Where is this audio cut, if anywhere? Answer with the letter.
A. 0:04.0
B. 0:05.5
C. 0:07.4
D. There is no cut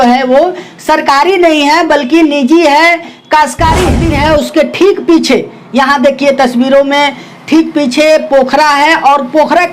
A